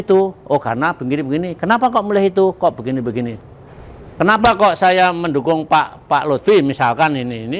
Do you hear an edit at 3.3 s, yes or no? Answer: yes